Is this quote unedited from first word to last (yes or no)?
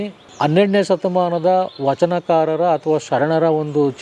yes